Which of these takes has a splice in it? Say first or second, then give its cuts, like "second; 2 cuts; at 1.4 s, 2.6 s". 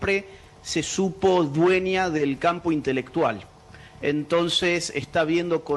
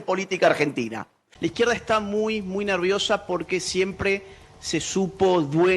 second; 1 cut; at 1.3 s